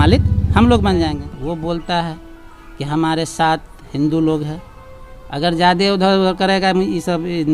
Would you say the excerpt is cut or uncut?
cut